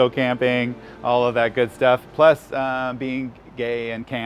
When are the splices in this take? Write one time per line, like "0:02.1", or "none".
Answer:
none